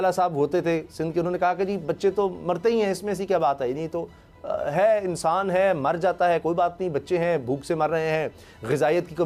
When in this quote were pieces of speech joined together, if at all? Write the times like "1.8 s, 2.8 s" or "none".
none

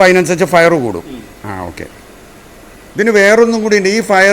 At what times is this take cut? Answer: 2.8 s

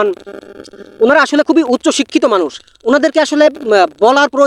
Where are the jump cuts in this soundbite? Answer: none

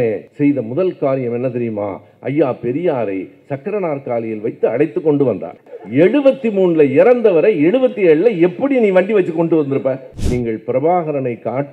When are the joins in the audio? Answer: 5.6 s, 10.1 s

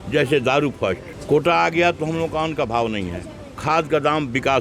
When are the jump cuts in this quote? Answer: 1.1 s

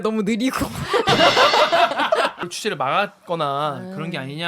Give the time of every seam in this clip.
2.5 s

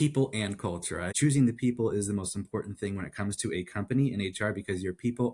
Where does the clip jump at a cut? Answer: 1.1 s

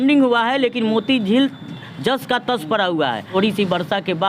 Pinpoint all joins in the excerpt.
3.3 s

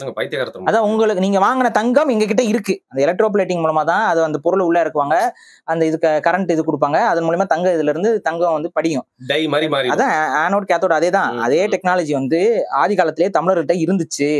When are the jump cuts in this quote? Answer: 2.8 s

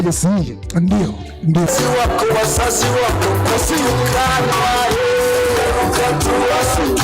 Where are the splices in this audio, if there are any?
1.7 s

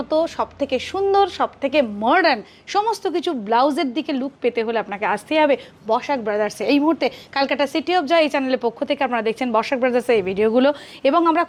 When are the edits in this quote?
none

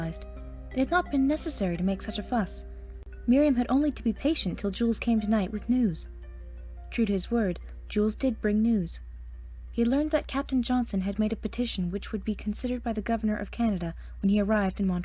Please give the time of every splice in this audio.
12.0 s

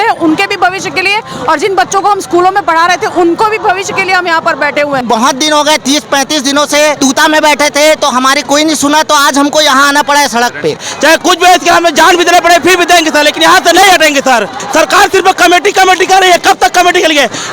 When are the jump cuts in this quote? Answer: 5.0 s, 7.0 s, 10.9 s, 14.6 s

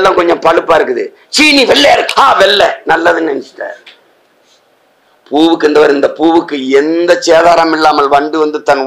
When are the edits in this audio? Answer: 5.0 s

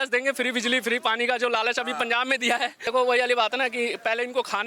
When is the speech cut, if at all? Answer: 2.8 s

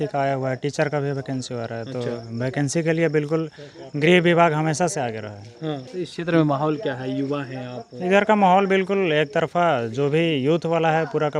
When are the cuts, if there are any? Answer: 5.9 s

